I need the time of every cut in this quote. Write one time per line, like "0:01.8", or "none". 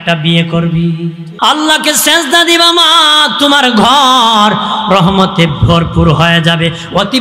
0:01.2